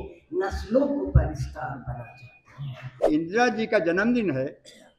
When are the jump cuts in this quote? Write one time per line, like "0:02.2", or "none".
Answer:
0:02.9